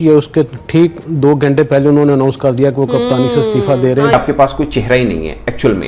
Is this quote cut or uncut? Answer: cut